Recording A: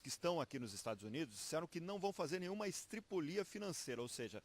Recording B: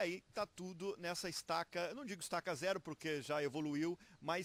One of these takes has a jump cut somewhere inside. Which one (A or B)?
A